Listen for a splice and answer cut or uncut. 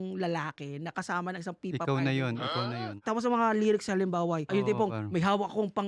cut